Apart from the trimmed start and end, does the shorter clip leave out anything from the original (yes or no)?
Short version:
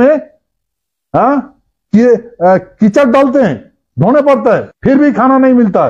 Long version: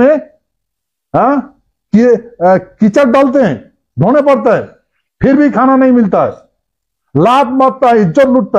yes